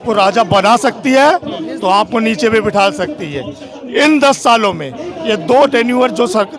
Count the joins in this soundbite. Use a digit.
0